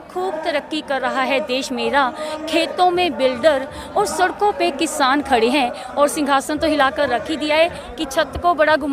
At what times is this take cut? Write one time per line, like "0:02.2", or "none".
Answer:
0:05.8
0:07.8